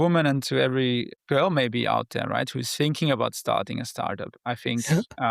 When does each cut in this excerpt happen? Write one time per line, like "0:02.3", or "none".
0:01.1

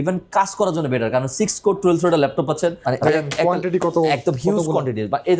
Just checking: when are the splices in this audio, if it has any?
0:02.8

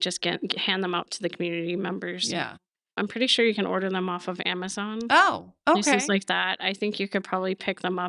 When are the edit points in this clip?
0:03.0

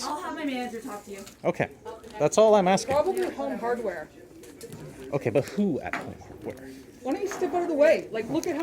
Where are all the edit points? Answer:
none

